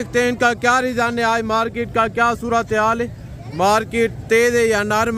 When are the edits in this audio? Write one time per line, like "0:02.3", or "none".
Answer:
none